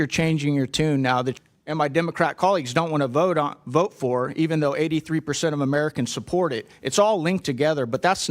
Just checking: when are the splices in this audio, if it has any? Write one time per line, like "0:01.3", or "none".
0:01.4